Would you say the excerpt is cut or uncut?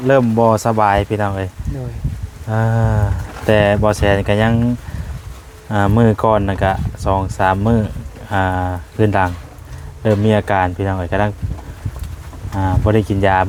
uncut